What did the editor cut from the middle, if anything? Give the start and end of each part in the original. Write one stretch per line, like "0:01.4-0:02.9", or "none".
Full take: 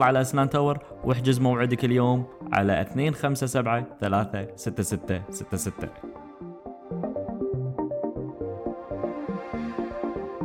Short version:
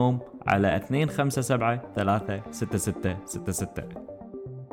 0:05.9-0:06.9